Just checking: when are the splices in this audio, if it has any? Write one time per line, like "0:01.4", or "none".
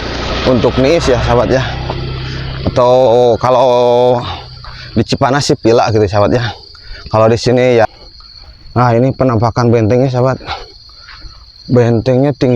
0:07.9